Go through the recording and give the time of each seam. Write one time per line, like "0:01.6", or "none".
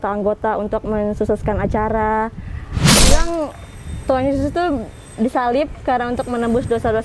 0:03.0

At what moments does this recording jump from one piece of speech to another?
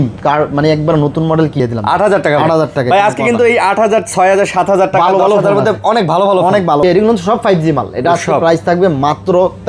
0:01.6
0:06.8

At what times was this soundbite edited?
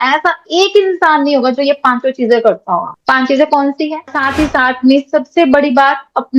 0:04.1

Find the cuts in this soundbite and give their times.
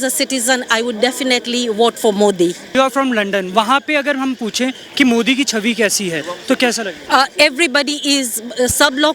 0:02.7

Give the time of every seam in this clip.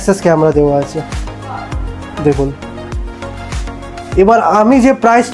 none

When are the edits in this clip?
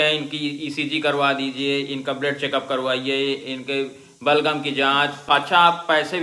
0:05.2

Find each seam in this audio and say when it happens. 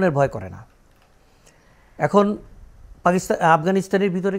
none

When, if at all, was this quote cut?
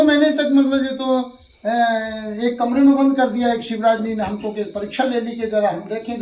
none

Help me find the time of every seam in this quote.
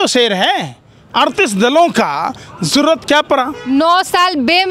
0:03.6

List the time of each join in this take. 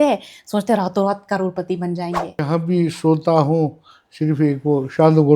0:02.4

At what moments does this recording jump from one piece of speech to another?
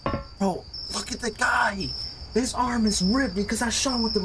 none

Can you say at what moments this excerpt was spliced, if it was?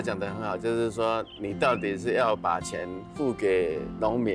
none

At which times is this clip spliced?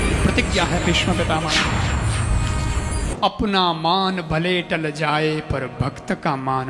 0:03.1

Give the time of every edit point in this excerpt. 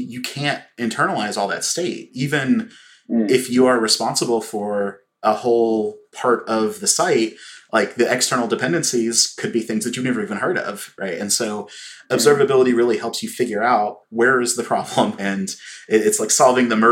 0:05.2

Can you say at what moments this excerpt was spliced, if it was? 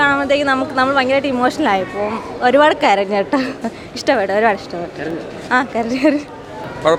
none

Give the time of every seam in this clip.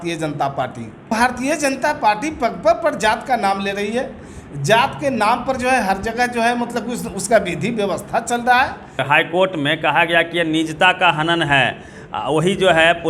0:01.1
0:09.0

